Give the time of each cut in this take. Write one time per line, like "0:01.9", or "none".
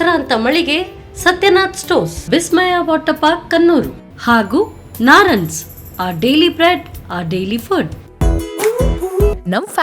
0:08.0